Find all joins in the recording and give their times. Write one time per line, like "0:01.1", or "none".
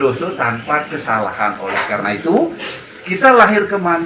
none